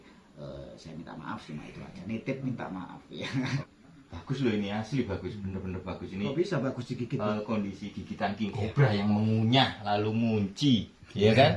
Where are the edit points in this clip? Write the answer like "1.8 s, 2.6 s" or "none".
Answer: 3.6 s, 7.3 s